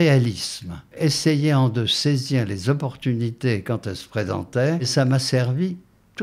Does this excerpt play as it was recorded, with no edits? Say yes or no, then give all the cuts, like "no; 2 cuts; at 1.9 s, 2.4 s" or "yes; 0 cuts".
no; 2 cuts; at 0.9 s, 4.9 s